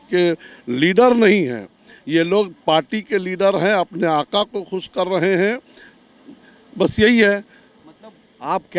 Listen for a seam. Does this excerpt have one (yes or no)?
no